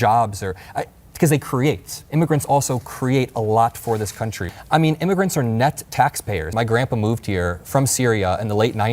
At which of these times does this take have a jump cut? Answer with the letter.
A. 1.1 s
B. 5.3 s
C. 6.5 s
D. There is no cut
C